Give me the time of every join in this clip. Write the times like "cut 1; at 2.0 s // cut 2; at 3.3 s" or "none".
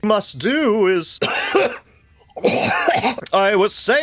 cut 1; at 1.1 s